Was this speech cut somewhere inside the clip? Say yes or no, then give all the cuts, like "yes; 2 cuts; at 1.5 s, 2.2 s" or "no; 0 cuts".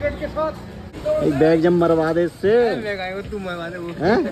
yes; 1 cut; at 0.9 s